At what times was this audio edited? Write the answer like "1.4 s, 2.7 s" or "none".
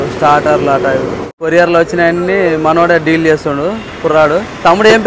1.4 s